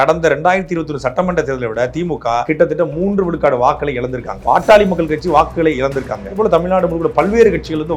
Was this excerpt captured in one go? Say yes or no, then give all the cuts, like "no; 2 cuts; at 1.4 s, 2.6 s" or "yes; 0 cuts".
no; 3 cuts; at 2.4 s, 4.4 s, 6.4 s